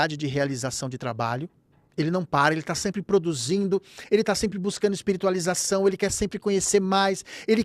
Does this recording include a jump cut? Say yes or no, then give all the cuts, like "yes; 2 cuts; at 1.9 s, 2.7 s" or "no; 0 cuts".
no; 0 cuts